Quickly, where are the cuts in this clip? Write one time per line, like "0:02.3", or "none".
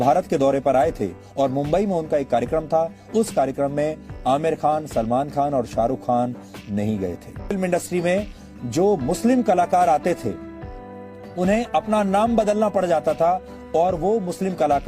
0:07.5

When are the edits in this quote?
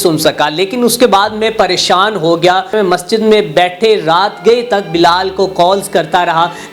0:02.7

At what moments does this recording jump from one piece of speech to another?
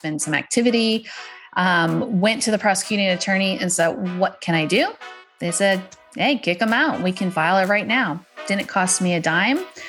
none

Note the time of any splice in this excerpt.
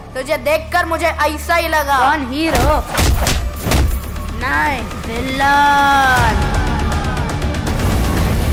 none

